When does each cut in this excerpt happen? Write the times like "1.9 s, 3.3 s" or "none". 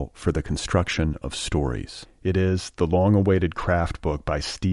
none